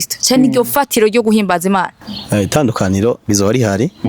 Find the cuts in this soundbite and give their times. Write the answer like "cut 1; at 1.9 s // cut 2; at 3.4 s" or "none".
cut 1; at 1.9 s